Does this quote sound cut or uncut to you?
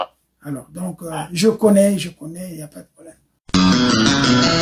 cut